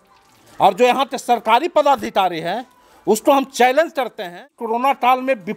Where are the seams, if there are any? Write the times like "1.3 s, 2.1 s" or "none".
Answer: 4.6 s